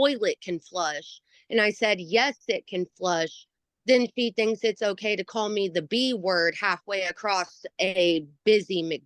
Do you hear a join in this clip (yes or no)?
no